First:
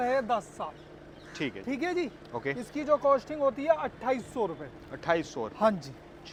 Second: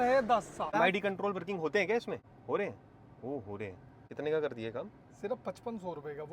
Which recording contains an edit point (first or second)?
second